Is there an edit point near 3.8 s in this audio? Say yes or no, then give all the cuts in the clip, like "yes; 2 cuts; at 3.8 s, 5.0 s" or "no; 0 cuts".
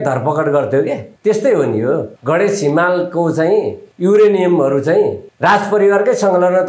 yes; 4 cuts; at 1.1 s, 2.1 s, 3.8 s, 5.3 s